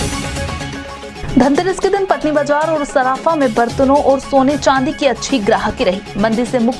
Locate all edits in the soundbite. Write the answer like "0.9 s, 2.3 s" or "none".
1.1 s